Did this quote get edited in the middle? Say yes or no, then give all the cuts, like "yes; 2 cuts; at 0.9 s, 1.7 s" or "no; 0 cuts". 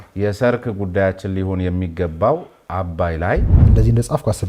yes; 1 cut; at 3.6 s